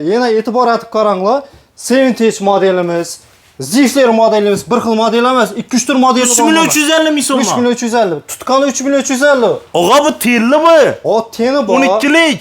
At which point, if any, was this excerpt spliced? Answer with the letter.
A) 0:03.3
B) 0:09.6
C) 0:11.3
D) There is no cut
D